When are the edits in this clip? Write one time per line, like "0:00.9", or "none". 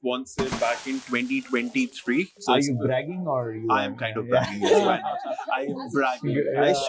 none